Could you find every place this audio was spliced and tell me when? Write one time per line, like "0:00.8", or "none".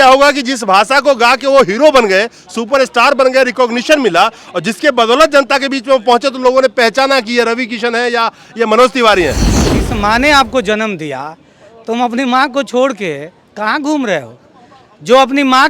0:09.8